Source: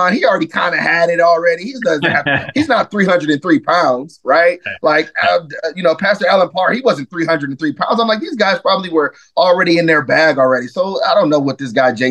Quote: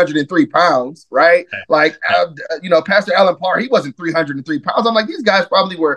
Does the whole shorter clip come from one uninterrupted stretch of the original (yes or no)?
yes